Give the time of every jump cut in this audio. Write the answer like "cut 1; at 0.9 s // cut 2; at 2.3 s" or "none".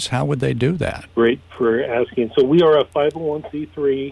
cut 1; at 1.0 s